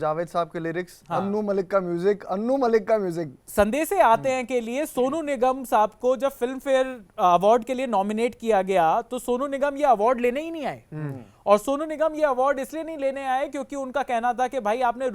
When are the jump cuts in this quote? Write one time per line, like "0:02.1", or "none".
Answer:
0:03.3